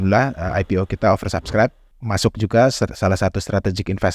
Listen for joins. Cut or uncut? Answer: cut